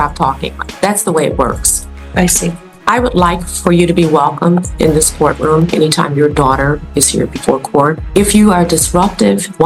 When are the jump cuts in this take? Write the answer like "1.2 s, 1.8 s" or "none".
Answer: none